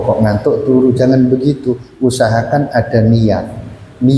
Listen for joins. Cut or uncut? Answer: uncut